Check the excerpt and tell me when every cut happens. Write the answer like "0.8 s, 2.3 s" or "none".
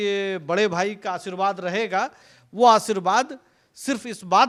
none